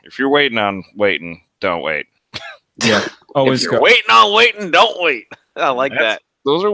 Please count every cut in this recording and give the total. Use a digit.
0